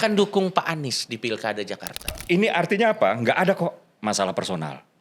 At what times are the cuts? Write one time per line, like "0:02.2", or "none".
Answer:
0:02.2